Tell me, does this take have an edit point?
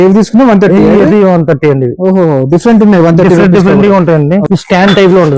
yes; 1 cut; at 4.5 s

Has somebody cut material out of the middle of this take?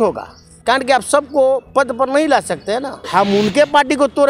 yes; 1 cut; at 3.0 s

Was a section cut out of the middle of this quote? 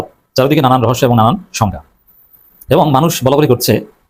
no; 0 cuts

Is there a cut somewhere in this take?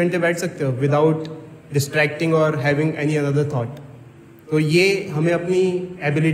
no; 0 cuts

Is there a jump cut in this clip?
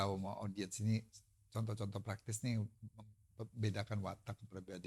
no; 0 cuts

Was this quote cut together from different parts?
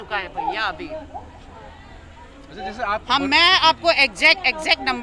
no; 0 cuts

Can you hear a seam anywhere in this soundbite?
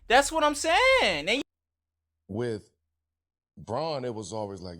yes; 1 cut; at 1.4 s

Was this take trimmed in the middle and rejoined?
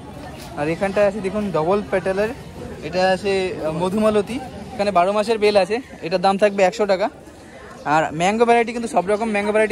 yes; 1 cut; at 4.8 s

